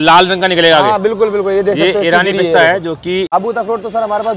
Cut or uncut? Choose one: cut